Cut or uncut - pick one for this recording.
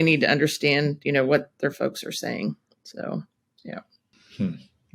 uncut